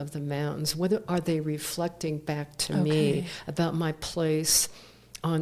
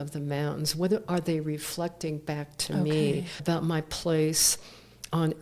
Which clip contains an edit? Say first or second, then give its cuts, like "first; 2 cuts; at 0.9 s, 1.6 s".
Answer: second; 1 cut; at 3.3 s